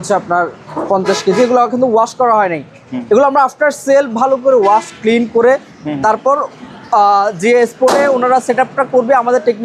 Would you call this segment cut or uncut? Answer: uncut